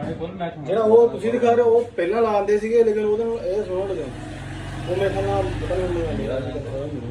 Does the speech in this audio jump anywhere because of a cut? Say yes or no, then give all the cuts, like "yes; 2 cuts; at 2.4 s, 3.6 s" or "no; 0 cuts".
no; 0 cuts